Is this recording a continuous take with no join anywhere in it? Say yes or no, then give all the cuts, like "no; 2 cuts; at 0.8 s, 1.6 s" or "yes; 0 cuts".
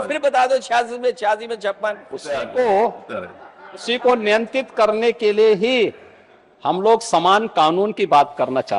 yes; 0 cuts